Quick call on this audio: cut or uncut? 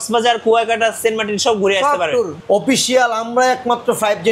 cut